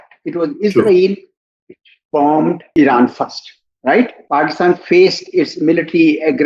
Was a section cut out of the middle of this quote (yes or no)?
yes